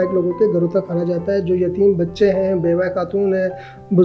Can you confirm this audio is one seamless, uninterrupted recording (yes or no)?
yes